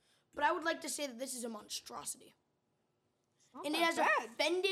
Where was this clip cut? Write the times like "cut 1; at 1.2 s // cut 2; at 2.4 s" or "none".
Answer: none